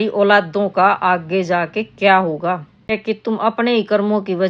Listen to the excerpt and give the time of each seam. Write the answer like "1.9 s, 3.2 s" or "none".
3.0 s